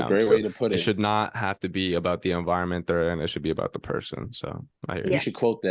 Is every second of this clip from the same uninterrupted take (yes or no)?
yes